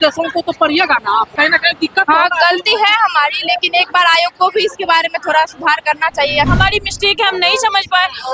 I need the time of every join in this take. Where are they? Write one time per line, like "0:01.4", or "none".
0:01.3
0:06.5